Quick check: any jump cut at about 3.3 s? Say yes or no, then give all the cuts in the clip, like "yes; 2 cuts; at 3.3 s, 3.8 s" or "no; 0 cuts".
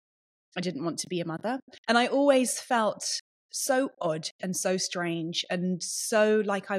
no; 1 cut; at 1.7 s